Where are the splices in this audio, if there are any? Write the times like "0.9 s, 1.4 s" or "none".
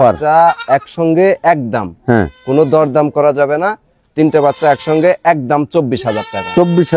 none